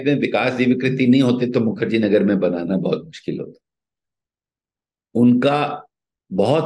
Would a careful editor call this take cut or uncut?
uncut